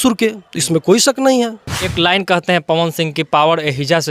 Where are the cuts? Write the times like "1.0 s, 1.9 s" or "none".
1.8 s